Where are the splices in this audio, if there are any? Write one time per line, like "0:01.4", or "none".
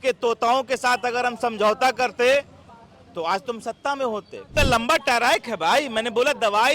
0:04.5

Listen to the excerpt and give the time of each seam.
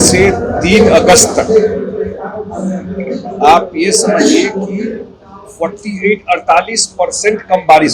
none

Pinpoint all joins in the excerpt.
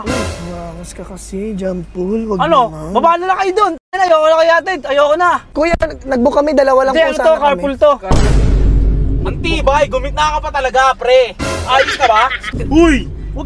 0:05.4
0:12.4

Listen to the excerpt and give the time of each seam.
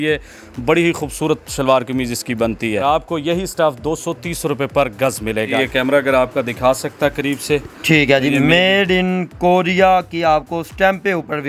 0:02.8
0:05.6

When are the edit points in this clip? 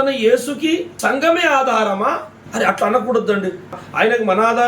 0:00.9
0:02.4
0:03.8

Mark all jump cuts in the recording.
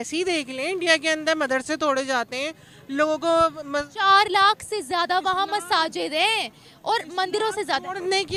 none

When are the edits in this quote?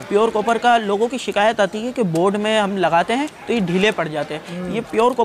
none

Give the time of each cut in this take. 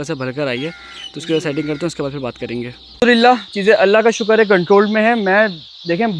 0:02.8

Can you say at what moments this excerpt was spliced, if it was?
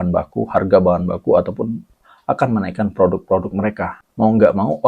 0:04.0

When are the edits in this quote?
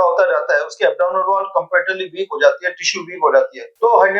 none

